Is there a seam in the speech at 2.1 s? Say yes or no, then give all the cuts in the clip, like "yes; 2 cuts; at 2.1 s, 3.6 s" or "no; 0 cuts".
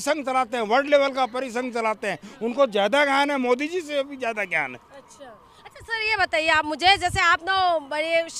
no; 0 cuts